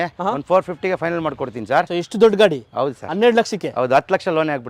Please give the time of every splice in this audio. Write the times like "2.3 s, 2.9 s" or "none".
1.9 s